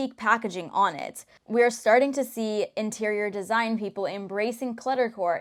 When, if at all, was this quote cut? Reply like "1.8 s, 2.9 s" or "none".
none